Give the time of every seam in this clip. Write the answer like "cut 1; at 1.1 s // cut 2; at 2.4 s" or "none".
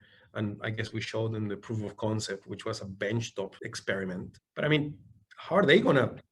cut 1; at 3.7 s // cut 2; at 4.4 s